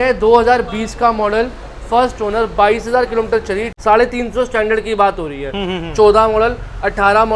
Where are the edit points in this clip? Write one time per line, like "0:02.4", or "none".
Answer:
0:03.7